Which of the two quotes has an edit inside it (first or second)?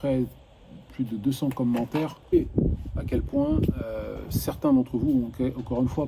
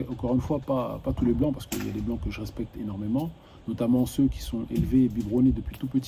first